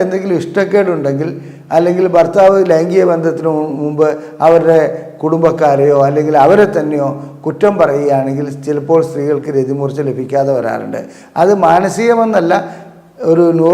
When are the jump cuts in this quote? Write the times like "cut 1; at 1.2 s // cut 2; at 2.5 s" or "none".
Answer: none